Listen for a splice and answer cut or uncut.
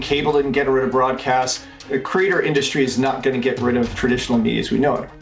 cut